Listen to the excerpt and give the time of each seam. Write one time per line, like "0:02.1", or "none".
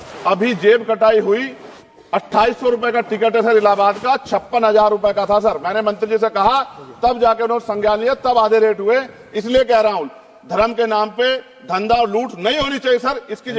none